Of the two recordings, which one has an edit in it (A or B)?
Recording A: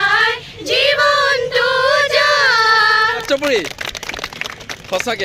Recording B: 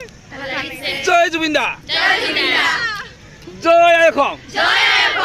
A